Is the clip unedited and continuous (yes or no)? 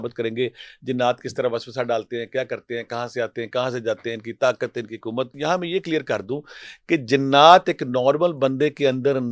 no